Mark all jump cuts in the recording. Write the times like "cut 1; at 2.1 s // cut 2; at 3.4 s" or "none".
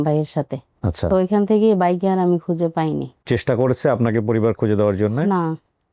cut 1; at 3.2 s